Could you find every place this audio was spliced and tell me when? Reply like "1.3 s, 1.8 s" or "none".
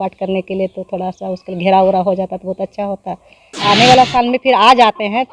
3.5 s